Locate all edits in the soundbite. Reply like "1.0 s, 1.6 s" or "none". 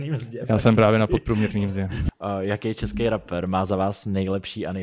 1.9 s